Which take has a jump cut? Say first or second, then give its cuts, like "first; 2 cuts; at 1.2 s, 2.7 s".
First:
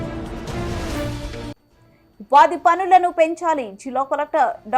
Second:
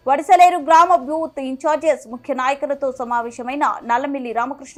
first; 1 cut; at 1.0 s